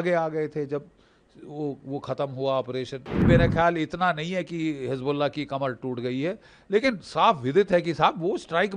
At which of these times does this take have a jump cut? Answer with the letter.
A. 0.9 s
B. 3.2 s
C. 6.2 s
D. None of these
B